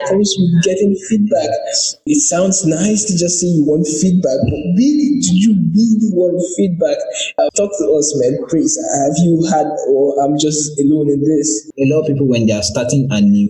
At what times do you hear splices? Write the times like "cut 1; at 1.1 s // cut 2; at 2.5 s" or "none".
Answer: cut 1; at 2.1 s // cut 2; at 7.2 s // cut 3; at 11.7 s